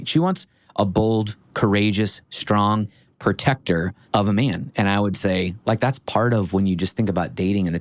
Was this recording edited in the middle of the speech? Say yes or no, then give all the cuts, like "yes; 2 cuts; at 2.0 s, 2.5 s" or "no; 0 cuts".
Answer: no; 0 cuts